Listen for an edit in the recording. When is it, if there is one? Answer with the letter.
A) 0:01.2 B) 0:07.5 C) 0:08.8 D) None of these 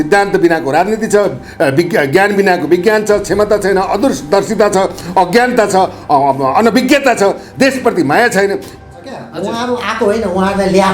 C